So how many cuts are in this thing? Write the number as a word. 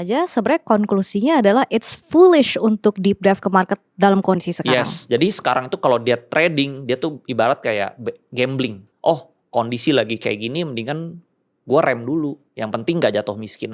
two